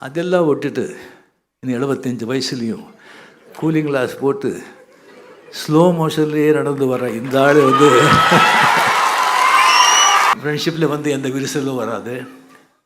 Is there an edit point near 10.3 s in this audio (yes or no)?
yes